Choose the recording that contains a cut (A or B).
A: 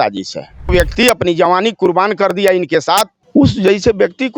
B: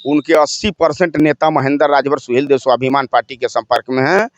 A